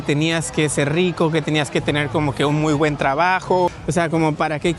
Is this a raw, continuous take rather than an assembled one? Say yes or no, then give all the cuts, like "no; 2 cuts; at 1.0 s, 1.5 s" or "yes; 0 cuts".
no; 1 cut; at 3.8 s